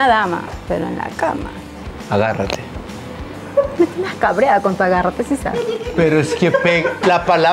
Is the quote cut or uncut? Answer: uncut